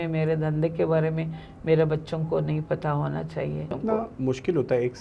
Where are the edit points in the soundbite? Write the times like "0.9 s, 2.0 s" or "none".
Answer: 3.8 s